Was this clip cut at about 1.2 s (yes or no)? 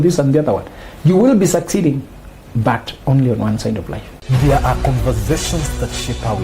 no